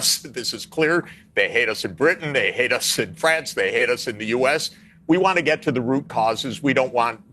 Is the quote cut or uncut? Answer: uncut